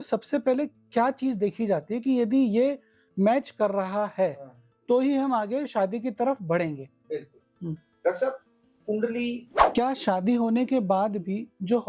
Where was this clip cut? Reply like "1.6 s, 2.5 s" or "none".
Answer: 9.5 s